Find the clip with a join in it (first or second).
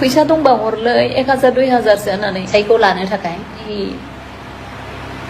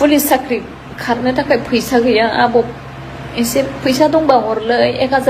first